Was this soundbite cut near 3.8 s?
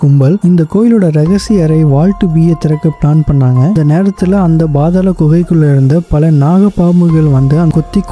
yes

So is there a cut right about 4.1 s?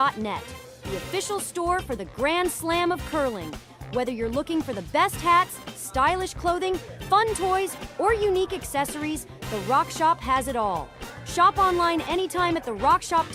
no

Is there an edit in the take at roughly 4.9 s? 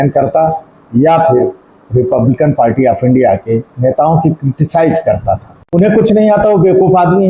no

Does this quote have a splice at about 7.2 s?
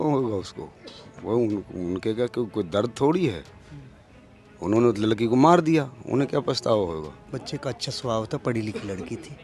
yes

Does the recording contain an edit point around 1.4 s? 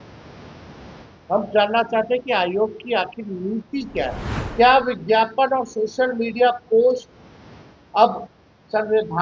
no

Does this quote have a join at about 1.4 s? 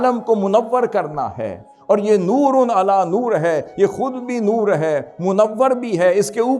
no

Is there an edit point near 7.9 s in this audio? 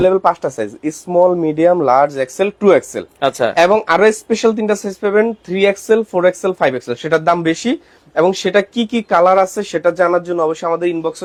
no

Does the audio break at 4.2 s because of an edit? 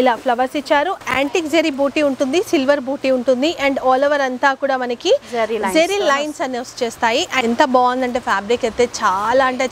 no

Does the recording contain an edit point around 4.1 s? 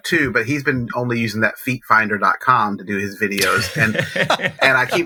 no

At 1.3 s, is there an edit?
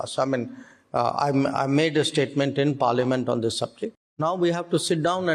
no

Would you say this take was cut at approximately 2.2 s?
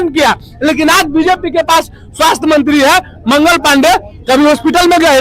no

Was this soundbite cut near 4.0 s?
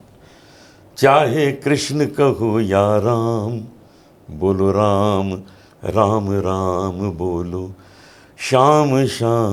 no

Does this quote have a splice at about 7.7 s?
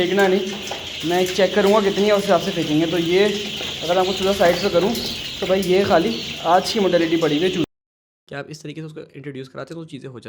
yes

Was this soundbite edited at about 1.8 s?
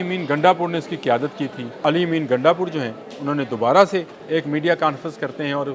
yes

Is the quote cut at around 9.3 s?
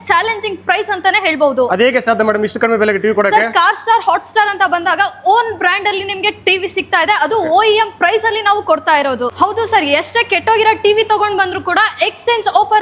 yes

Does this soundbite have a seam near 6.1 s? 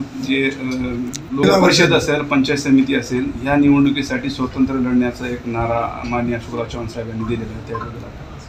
no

